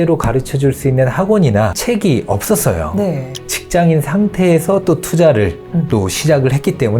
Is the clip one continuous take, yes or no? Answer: no